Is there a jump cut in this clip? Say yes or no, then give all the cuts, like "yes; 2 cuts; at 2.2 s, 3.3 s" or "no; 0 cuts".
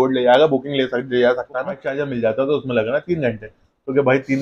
yes; 1 cut; at 1.9 s